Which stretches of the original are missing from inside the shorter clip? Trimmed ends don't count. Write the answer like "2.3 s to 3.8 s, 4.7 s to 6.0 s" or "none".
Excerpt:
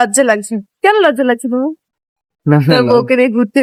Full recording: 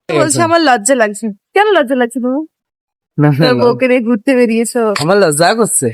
none